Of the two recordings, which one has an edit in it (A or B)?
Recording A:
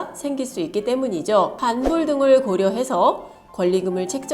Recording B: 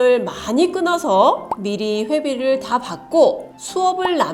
A